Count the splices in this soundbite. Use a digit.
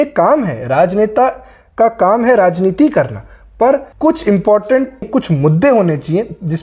2